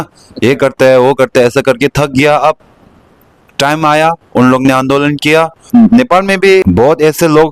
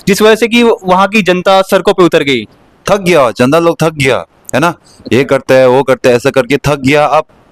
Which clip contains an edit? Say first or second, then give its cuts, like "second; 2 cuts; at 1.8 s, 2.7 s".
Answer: first; 2 cuts; at 5.7 s, 6.6 s